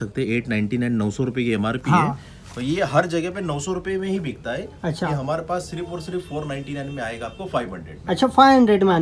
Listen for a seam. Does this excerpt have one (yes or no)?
no